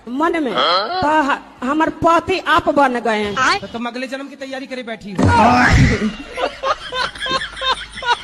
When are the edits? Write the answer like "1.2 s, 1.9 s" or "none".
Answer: none